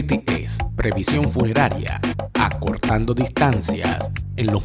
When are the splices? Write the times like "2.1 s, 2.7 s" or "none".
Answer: none